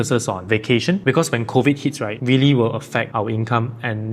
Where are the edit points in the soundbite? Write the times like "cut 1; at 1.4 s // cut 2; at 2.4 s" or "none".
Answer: cut 1; at 1.0 s // cut 2; at 2.1 s